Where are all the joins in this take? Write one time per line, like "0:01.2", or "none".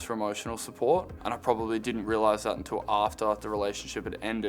none